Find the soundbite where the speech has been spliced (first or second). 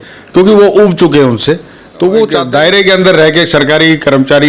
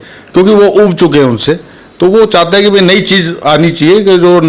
first